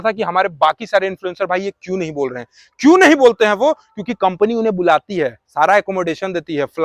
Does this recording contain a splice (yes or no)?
no